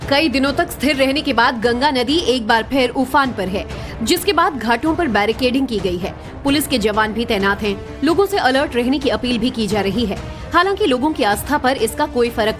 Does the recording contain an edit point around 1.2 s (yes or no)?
yes